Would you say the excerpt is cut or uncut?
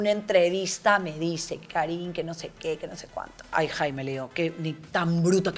cut